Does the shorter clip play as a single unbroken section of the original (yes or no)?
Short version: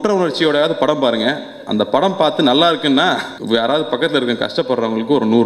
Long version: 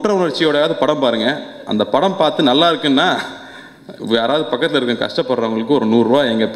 no